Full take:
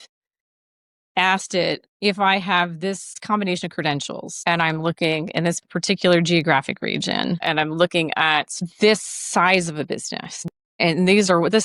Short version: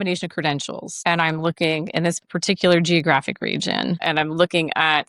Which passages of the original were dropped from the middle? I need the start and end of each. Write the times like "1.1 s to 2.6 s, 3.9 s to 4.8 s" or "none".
none